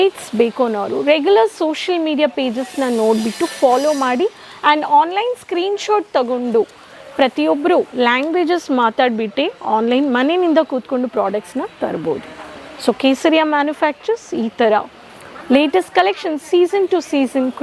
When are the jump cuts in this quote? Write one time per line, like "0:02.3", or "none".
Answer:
none